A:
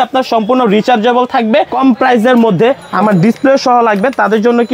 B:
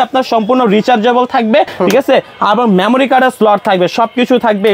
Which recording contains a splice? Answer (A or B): A